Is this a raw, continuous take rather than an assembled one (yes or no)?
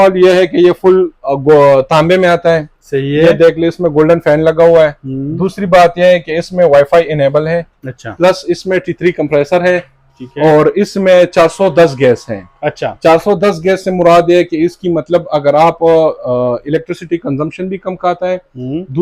yes